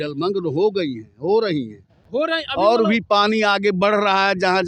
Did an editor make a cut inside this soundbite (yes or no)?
no